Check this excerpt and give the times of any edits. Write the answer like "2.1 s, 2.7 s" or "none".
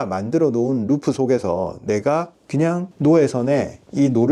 none